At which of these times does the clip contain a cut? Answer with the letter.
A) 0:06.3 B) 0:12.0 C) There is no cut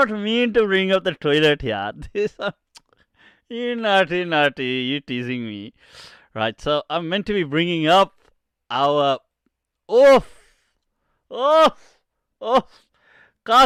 C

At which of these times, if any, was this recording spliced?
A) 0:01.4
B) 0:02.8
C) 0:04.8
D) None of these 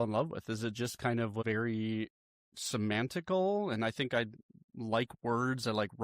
A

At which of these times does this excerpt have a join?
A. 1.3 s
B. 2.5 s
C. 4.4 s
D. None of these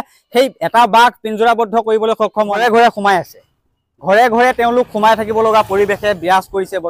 B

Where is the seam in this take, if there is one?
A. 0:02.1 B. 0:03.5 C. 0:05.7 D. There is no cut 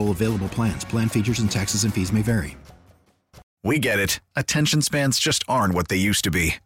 B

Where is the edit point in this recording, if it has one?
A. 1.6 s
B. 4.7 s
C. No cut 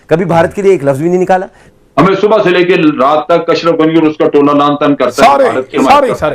A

